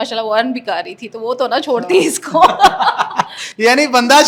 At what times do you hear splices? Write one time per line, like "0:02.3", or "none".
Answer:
none